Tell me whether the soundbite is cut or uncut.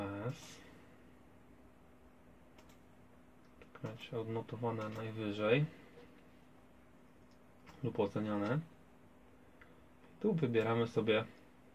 uncut